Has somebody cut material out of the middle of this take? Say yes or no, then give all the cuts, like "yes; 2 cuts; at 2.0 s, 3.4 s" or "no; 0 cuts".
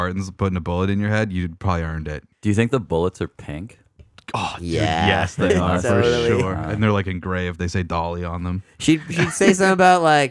yes; 1 cut; at 2.2 s